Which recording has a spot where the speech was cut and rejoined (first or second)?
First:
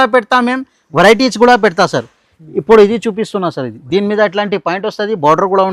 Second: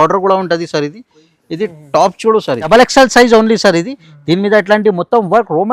second